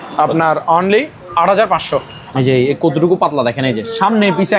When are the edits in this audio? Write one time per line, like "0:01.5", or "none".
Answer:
0:02.2